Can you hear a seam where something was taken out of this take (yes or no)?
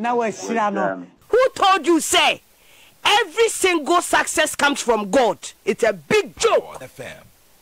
yes